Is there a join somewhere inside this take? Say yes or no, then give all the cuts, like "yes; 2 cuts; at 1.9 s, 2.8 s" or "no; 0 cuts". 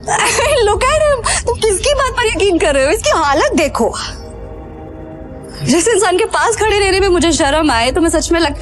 no; 0 cuts